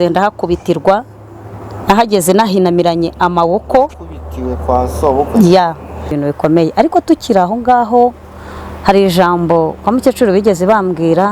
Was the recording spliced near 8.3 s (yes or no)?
no